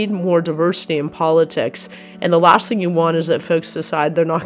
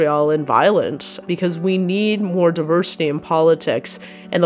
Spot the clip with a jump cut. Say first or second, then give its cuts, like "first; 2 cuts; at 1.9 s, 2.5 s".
second; 1 cut; at 1.1 s